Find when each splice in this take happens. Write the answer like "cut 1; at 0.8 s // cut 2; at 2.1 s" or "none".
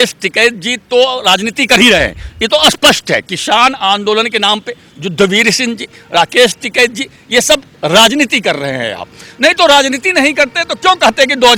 none

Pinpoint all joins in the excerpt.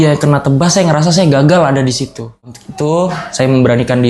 cut 1; at 2.6 s

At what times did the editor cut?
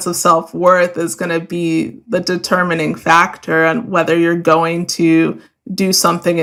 none

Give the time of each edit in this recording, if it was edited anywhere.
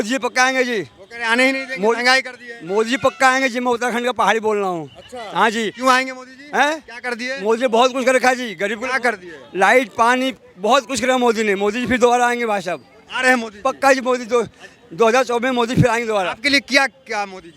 none

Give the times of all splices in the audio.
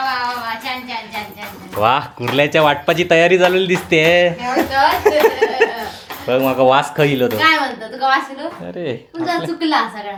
none

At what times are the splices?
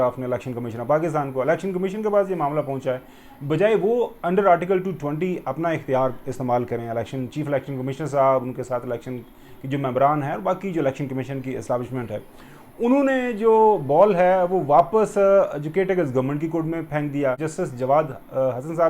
cut 1; at 17.5 s

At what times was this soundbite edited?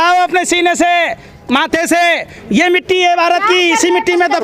none

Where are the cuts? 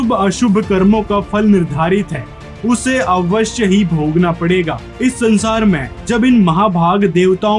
none

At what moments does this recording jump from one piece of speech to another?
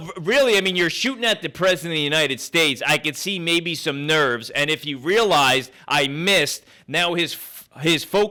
none

